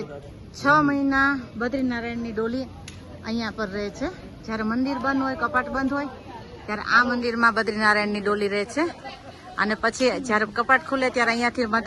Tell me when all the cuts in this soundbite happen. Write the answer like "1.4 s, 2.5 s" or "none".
none